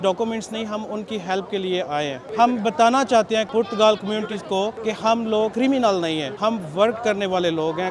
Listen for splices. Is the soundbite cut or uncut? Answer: cut